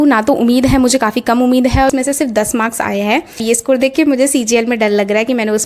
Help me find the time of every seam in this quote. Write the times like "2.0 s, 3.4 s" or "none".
1.9 s, 3.4 s

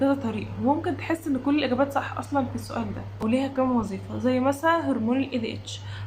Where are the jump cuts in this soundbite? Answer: 3.1 s

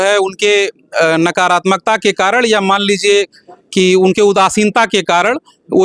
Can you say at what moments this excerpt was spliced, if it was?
none

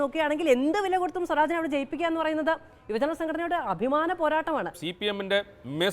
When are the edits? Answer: 4.8 s

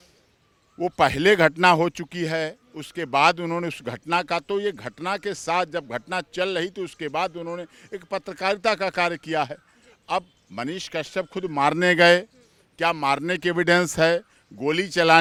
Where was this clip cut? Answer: none

